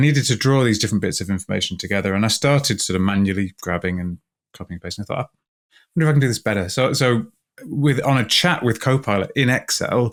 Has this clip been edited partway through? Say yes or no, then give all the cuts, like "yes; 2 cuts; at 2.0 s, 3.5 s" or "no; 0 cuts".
no; 0 cuts